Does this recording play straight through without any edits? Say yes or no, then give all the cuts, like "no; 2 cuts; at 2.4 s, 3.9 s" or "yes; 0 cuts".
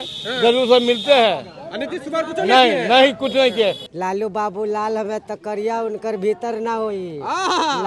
no; 1 cut; at 3.9 s